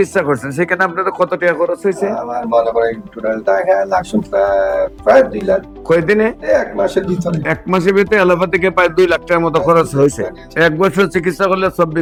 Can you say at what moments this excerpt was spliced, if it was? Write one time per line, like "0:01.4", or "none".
none

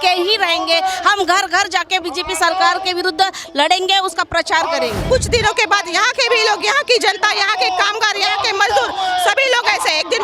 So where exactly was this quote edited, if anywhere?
0:05.0

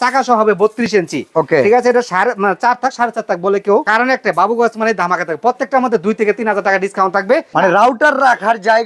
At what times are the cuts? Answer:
0:03.9
0:07.5

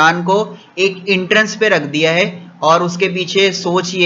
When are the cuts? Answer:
none

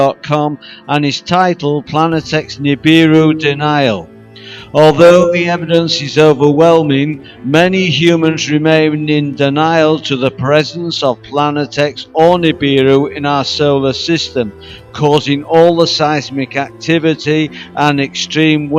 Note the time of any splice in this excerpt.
none

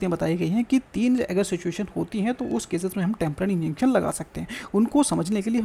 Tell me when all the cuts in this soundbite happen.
none

